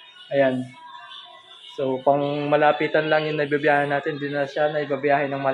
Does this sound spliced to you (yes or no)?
no